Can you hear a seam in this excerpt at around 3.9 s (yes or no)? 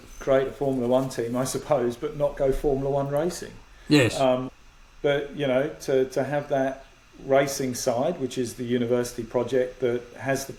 no